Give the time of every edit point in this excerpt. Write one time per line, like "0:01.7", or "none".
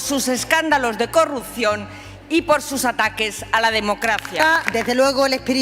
0:04.4